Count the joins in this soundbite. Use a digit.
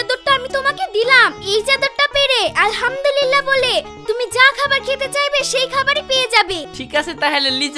1